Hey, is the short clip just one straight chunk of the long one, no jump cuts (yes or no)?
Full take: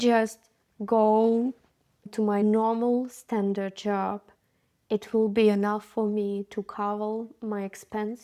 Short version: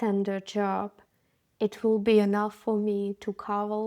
yes